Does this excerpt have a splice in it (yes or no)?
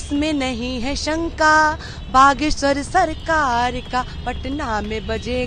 no